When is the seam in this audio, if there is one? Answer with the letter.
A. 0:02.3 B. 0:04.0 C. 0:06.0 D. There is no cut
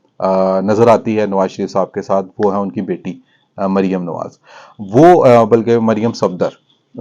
D